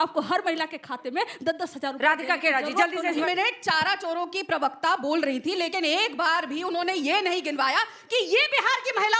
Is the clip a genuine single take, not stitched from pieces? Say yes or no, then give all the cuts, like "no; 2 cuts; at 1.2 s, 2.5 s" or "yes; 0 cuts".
no; 1 cut; at 3.2 s